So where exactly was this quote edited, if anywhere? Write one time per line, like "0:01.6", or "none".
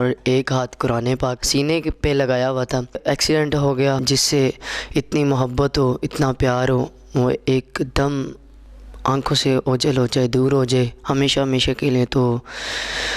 0:01.4
0:03.0
0:04.0